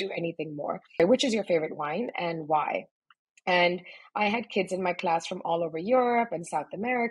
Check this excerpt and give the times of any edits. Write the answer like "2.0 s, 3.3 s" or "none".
1.0 s